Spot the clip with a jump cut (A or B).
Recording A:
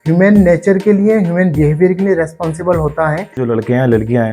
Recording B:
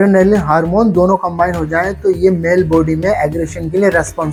A